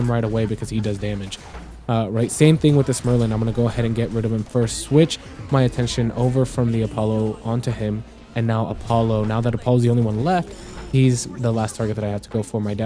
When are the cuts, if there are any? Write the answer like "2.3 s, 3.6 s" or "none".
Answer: none

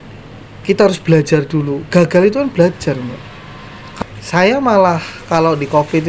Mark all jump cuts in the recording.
3.9 s

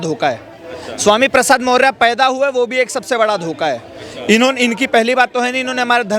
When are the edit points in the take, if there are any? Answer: none

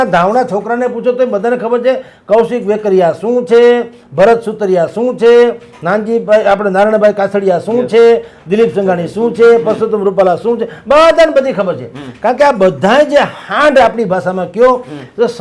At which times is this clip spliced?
none

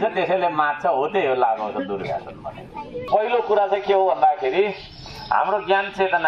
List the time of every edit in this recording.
3.0 s

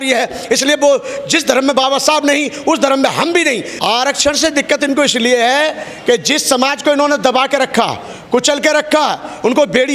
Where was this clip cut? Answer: 3.7 s

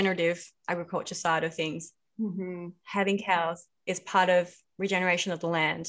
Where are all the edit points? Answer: none

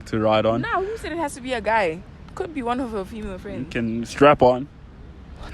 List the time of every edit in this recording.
none

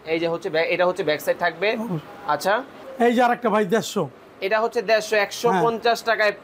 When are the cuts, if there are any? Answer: 2.8 s

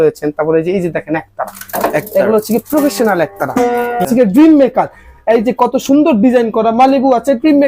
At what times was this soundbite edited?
4.1 s

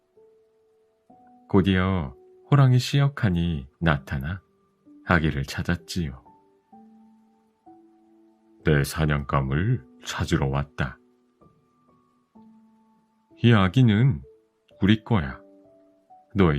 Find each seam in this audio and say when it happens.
6.2 s, 8.5 s

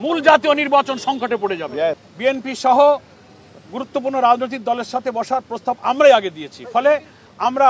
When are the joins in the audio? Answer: 2.1 s

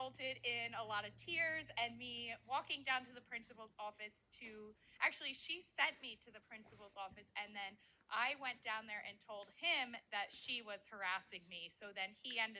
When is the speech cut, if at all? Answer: none

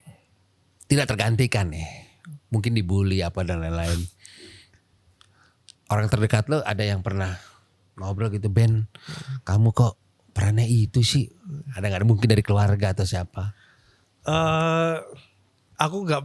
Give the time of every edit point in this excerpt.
none

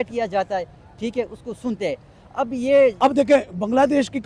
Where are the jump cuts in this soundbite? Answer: 3.0 s

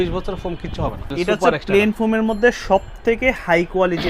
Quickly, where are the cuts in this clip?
1.1 s

